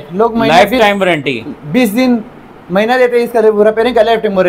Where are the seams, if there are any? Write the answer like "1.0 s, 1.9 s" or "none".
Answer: none